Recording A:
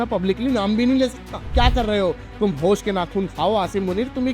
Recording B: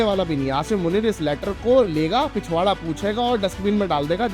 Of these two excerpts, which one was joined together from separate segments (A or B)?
A